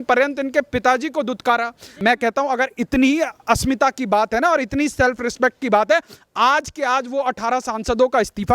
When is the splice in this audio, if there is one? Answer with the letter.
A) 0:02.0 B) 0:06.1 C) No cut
A